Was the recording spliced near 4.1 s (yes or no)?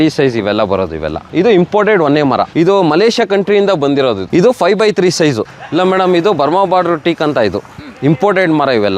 no